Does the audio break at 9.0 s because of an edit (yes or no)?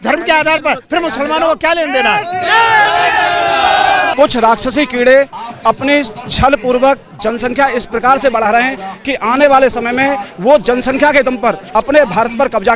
no